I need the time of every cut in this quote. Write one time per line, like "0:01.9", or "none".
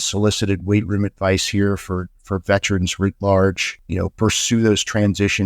0:03.7